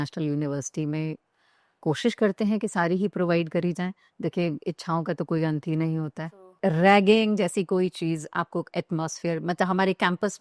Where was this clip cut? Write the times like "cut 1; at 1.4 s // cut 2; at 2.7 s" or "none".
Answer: cut 1; at 6.5 s

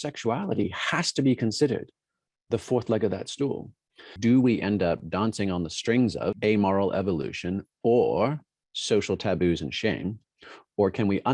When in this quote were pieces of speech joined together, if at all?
cut 1; at 4.1 s // cut 2; at 6.4 s

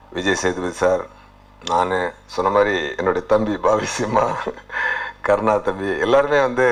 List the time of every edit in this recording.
none

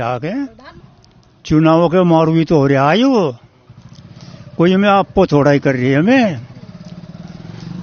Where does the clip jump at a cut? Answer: cut 1; at 1.0 s

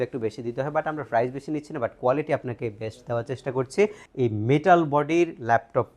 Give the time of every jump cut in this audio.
cut 1; at 4.0 s

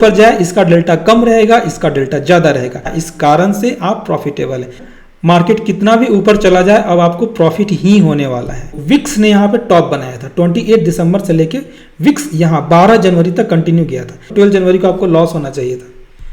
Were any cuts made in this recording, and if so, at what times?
cut 1; at 3.0 s // cut 2; at 4.8 s // cut 3; at 8.7 s // cut 4; at 14.3 s

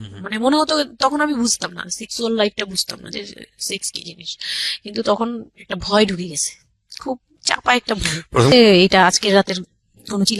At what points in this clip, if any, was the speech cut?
cut 1; at 8.5 s

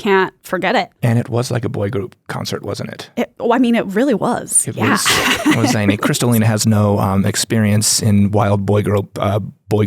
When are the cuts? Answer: cut 1; at 0.9 s

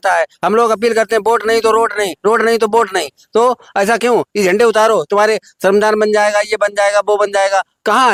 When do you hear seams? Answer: none

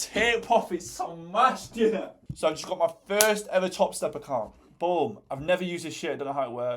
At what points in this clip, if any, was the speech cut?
cut 1; at 2.3 s

